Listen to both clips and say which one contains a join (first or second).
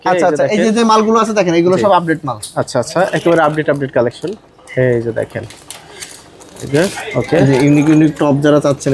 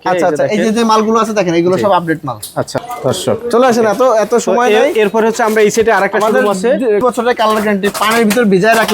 second